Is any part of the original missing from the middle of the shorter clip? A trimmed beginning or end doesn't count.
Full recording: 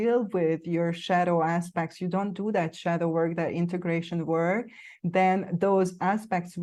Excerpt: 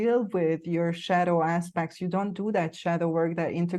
no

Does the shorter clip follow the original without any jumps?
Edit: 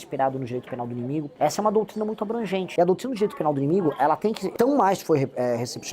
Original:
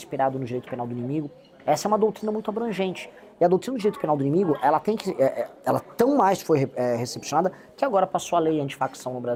no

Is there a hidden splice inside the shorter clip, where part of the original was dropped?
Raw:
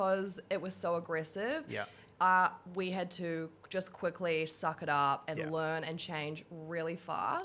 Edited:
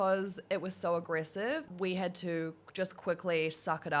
yes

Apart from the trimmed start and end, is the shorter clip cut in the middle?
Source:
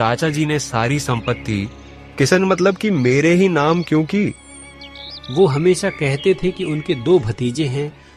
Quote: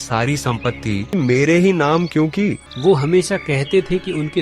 yes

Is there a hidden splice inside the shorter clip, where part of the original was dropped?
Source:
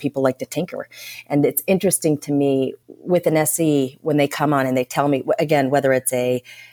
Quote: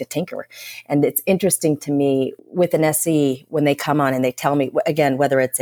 yes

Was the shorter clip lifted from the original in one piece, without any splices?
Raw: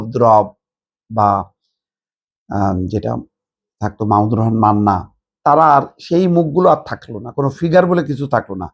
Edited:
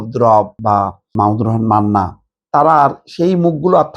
no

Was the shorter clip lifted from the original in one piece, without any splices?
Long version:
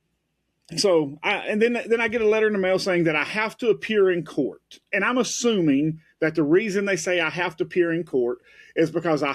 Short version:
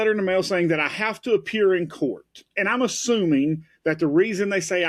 yes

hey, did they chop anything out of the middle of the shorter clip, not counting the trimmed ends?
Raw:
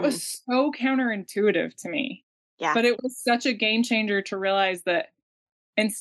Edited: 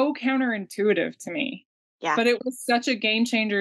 no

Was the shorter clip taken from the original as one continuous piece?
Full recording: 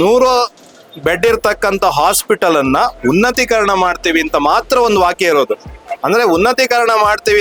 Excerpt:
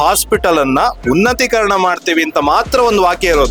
yes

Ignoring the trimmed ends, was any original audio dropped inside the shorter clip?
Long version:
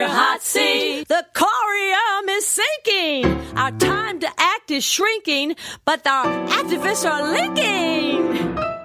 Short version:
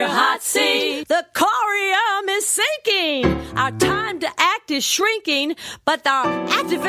no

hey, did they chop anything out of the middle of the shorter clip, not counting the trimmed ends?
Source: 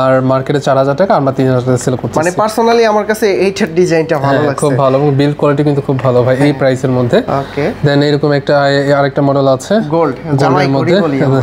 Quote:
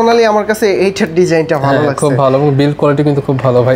no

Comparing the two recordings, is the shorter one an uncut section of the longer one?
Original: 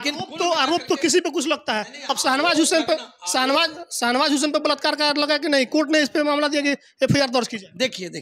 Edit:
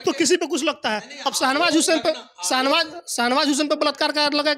yes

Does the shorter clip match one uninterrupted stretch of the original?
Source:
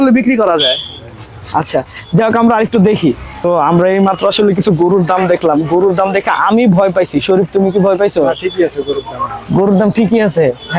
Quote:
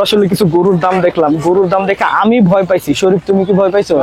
yes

